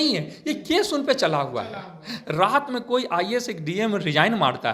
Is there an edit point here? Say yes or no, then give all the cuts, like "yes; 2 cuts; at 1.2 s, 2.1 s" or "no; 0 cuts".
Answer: no; 0 cuts